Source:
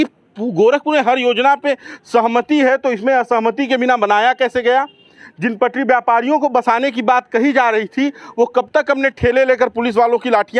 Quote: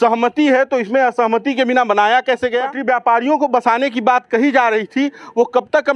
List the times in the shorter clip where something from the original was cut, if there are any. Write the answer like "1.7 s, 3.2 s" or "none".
2.8 s